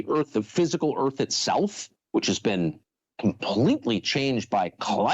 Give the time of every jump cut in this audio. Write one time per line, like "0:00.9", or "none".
0:01.3